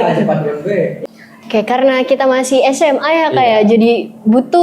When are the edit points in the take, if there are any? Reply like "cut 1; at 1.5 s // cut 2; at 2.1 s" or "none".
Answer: cut 1; at 1.0 s